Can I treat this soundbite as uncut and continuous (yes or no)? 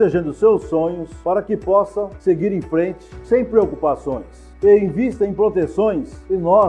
yes